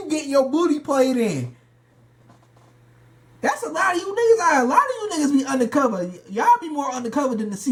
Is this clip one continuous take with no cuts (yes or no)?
yes